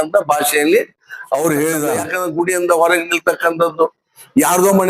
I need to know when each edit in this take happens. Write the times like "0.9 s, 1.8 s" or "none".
2.1 s